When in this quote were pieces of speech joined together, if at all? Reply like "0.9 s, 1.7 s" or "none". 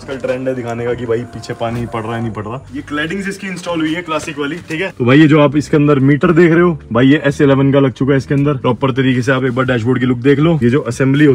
2.7 s, 4.9 s, 8.6 s, 10.6 s